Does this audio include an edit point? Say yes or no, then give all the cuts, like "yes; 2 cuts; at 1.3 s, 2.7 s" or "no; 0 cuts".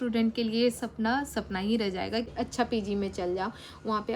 yes; 1 cut; at 2.3 s